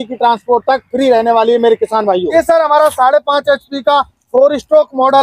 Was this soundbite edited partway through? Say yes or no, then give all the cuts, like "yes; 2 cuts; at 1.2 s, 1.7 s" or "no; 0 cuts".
yes; 1 cut; at 2.3 s